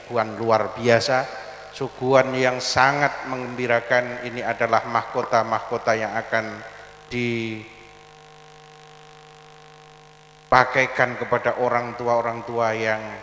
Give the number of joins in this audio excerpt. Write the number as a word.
zero